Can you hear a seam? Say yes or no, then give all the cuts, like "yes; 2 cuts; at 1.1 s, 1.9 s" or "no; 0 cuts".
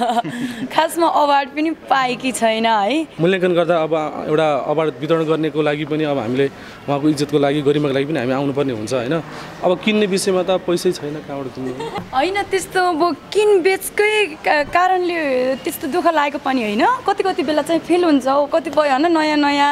yes; 3 cuts; at 3.1 s, 12.1 s, 18.5 s